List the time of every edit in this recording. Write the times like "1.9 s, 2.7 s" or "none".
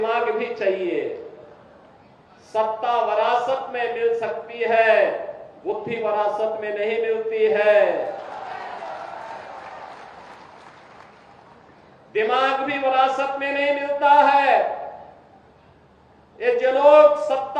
none